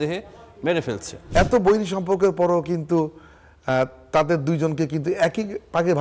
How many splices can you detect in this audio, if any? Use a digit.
1